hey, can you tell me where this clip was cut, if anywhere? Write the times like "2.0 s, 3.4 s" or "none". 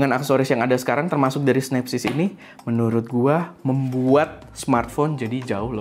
none